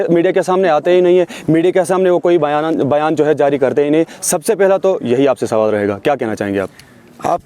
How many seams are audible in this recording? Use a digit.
0